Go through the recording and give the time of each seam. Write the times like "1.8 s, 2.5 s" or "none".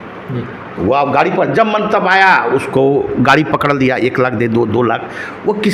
none